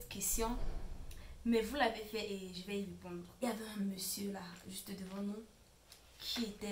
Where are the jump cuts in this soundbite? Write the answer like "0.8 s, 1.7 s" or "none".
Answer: 3.4 s